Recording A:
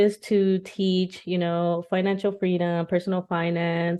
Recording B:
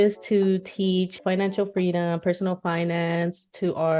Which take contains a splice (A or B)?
B